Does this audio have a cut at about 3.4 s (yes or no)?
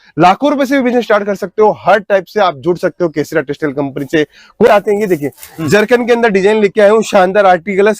no